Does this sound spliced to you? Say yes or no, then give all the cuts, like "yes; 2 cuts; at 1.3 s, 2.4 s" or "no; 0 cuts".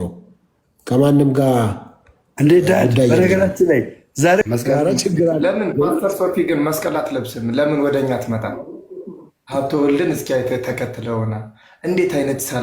yes; 1 cut; at 4.4 s